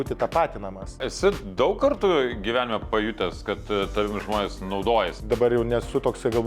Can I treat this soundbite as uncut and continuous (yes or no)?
no